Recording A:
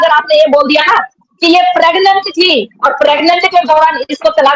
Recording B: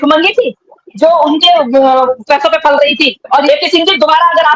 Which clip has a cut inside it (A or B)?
B